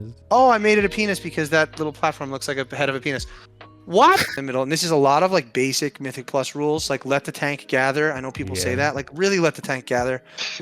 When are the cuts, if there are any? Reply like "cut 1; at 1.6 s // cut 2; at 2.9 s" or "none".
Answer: cut 1; at 4.3 s